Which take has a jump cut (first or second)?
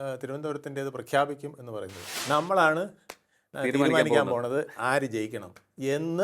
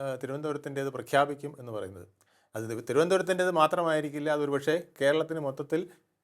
first